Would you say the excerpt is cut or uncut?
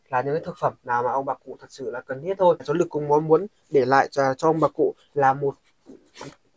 cut